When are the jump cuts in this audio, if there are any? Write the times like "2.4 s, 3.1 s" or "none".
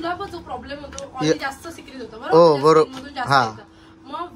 none